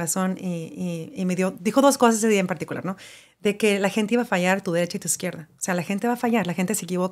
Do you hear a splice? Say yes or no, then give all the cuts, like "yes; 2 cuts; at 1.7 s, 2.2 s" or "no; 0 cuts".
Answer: no; 0 cuts